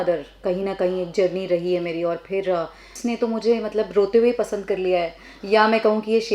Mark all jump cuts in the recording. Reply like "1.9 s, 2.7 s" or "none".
3.0 s